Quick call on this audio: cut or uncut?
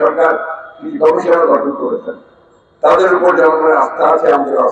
uncut